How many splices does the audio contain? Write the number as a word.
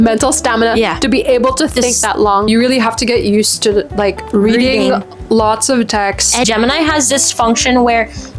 two